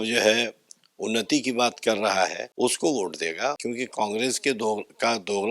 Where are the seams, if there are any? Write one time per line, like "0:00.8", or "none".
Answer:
0:02.4
0:03.6

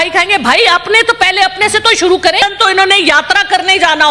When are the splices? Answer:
0:02.4

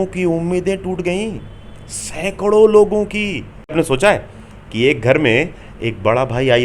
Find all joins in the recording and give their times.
0:03.7

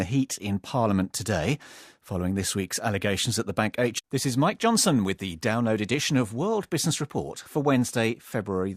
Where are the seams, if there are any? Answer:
none

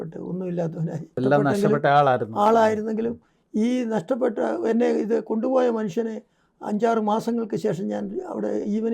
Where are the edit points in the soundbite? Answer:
0:01.2

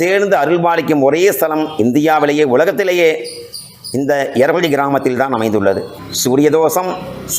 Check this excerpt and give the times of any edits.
0:06.0

